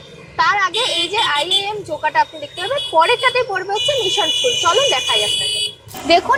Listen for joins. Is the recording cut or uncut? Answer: uncut